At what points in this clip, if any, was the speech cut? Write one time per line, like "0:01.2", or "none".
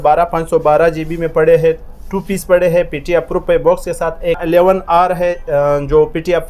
0:04.4

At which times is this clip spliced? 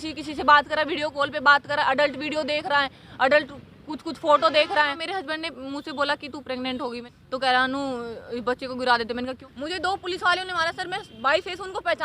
0:05.0
0:07.0
0:09.4

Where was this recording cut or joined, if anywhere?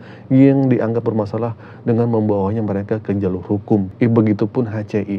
0:03.9

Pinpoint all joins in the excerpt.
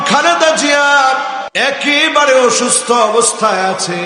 0:01.5

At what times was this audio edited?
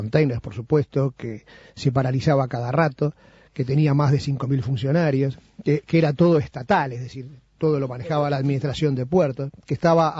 0:02.4

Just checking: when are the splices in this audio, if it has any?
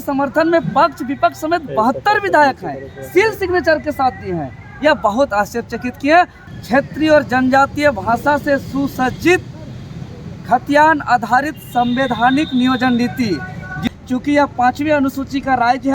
0:06.4
0:13.8

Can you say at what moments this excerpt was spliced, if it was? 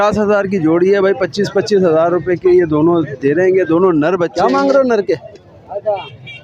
0:04.3

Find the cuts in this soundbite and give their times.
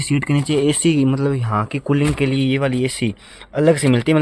none

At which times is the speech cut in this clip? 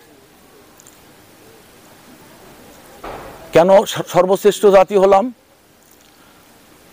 none

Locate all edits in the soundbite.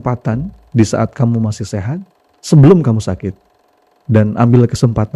none

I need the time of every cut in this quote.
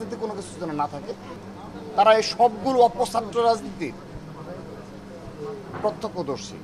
0:01.4

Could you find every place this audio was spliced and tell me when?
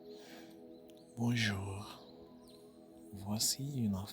0:01.1

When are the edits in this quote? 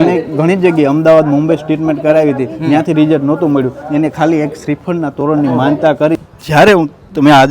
0:06.2

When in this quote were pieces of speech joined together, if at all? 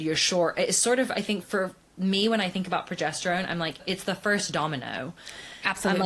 0:01.4
0:03.8

